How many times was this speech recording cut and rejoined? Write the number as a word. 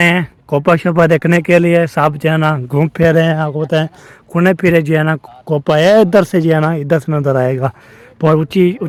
zero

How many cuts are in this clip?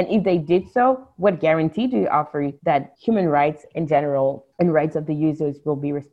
two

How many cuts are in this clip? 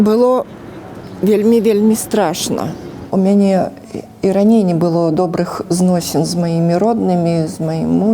one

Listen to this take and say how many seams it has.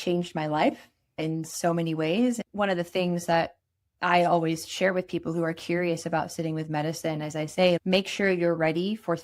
three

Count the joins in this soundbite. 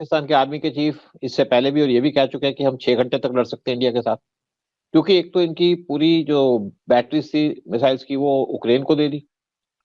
zero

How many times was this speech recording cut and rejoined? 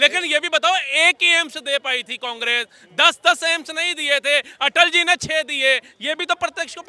zero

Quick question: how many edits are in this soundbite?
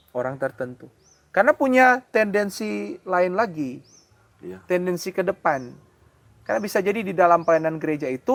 zero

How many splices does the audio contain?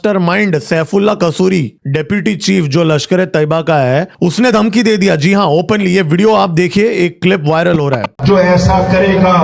one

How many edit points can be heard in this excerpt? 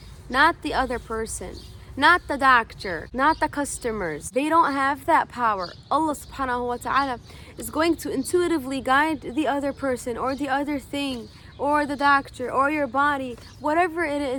zero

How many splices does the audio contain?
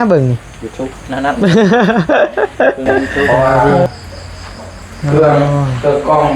one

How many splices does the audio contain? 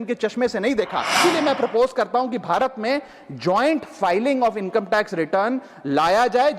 one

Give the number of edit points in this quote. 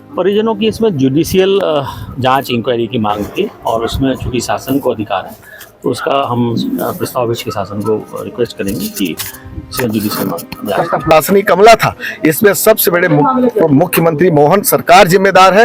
one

